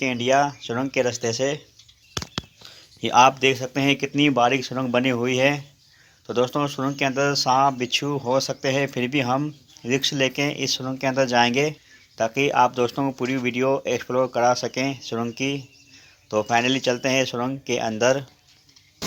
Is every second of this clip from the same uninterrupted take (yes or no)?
yes